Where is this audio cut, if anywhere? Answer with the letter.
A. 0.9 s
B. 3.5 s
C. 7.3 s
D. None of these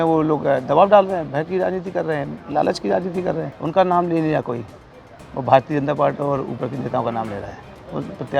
B